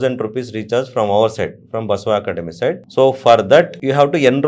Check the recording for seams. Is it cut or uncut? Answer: uncut